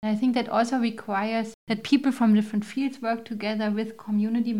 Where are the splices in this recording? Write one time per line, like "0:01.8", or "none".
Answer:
0:01.6